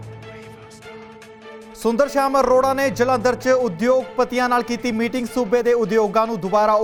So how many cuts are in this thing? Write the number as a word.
zero